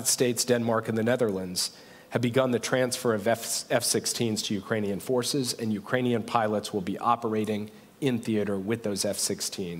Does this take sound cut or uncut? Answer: uncut